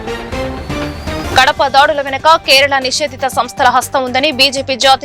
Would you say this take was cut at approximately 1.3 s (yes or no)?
yes